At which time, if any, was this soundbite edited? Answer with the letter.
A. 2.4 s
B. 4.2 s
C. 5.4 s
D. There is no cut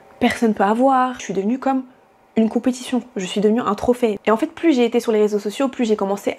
B